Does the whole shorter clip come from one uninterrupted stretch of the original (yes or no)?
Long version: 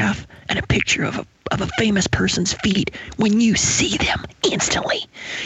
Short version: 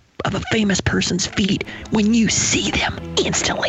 yes